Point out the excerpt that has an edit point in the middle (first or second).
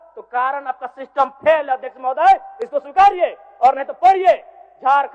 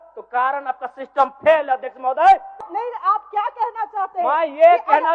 second